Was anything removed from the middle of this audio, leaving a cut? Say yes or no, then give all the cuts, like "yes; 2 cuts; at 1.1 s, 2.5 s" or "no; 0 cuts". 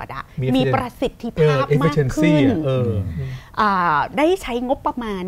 no; 0 cuts